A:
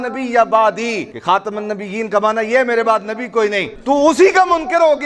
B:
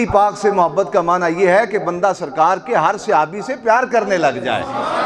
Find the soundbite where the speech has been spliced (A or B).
A